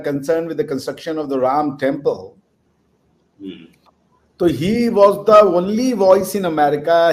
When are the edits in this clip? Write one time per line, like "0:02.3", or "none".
none